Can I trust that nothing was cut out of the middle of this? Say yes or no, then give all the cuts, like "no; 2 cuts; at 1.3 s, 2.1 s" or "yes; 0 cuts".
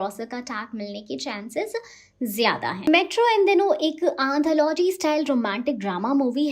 no; 1 cut; at 2.9 s